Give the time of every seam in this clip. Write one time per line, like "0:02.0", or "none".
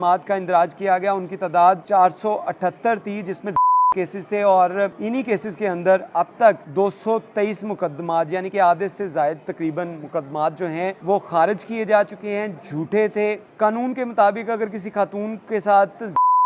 0:01.8
0:05.0
0:06.6
0:11.0
0:13.4